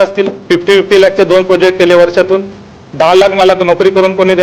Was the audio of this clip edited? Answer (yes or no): yes